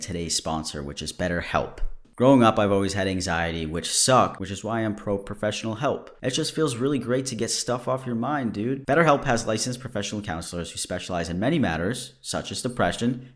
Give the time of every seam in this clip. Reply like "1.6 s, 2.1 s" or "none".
2.0 s, 4.4 s